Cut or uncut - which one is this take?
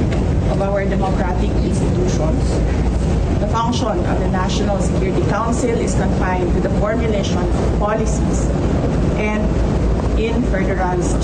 uncut